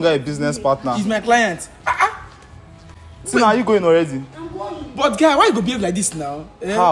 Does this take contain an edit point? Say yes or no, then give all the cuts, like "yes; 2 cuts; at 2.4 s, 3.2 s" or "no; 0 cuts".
no; 0 cuts